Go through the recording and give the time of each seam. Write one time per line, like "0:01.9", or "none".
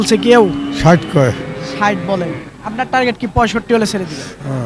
none